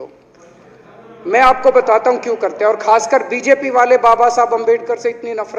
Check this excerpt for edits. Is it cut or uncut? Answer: uncut